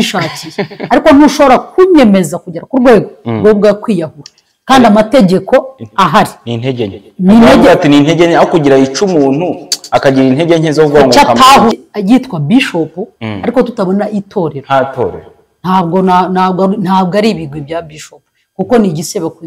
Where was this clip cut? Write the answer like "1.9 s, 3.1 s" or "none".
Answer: 11.7 s